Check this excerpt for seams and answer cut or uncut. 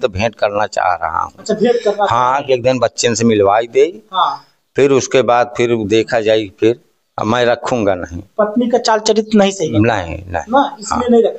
uncut